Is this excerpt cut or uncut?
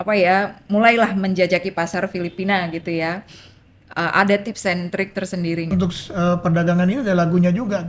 cut